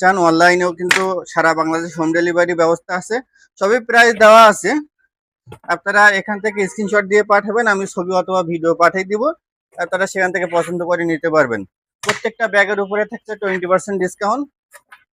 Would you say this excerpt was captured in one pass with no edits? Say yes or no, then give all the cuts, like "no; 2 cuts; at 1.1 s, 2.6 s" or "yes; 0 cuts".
yes; 0 cuts